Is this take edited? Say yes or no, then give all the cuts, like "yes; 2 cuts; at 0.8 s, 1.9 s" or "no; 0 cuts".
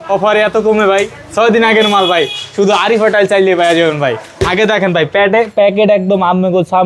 no; 0 cuts